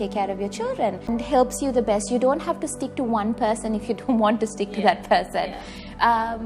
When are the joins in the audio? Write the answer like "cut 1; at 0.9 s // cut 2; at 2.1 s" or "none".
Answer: cut 1; at 1.1 s